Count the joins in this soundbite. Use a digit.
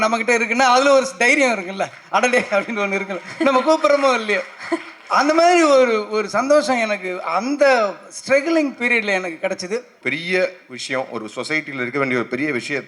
1